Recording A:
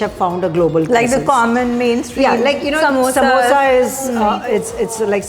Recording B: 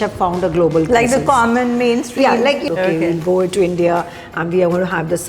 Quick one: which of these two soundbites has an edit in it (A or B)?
B